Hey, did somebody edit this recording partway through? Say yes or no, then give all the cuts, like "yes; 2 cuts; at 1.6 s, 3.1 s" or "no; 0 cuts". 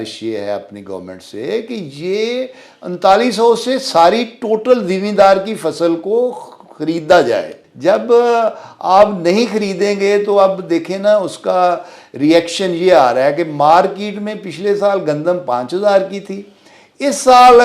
yes; 1 cut; at 7.6 s